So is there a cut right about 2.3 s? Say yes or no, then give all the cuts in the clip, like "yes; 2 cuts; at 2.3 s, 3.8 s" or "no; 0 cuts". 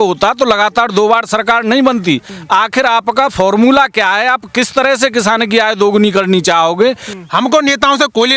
yes; 2 cuts; at 2.3 s, 7.1 s